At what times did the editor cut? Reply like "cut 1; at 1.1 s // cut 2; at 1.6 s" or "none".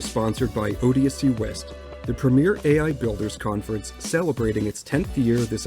cut 1; at 1.3 s

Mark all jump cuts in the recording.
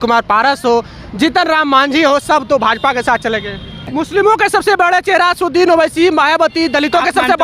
cut 1; at 3.9 s

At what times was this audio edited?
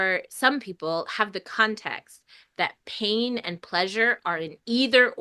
none

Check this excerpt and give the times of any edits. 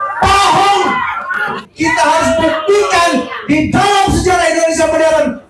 cut 1; at 1.6 s

